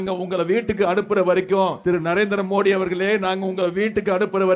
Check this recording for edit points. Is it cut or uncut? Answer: cut